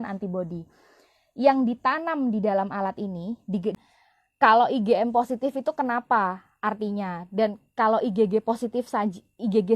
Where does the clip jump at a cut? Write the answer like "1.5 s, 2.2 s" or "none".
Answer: 3.8 s